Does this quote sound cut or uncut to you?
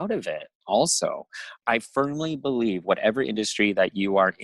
cut